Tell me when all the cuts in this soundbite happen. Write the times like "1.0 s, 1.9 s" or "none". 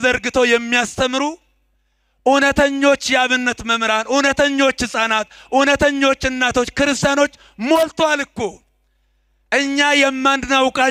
none